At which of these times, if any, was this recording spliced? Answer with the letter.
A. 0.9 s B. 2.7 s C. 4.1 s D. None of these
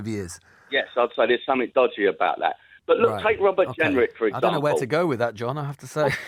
D